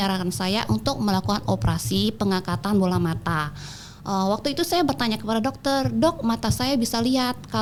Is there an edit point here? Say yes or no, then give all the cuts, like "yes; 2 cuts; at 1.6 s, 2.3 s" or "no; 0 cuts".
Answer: no; 0 cuts